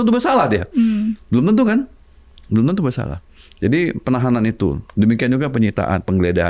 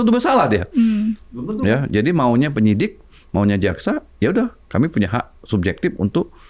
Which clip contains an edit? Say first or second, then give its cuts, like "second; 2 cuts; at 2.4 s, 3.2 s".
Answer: second; 1 cut; at 1.7 s